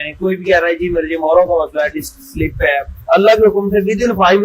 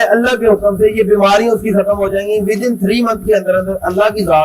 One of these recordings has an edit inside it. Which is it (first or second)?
first